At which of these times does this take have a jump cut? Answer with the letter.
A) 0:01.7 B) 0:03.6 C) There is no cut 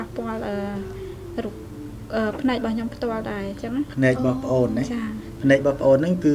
C